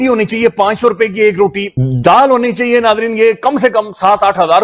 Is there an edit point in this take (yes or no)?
yes